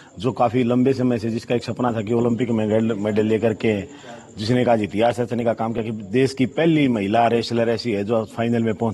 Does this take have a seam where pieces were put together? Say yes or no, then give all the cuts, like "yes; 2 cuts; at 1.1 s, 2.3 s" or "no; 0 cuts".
no; 0 cuts